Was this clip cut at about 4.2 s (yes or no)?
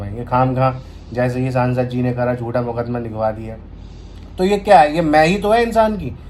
no